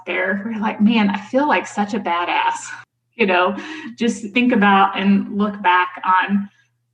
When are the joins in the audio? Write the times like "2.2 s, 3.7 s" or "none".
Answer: 2.7 s